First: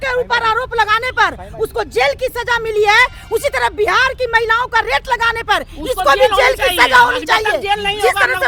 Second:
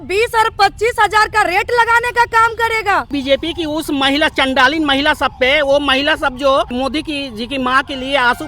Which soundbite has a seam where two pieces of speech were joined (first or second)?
second